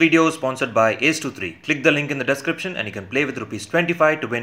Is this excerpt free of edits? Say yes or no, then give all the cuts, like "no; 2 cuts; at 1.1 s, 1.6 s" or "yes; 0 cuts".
yes; 0 cuts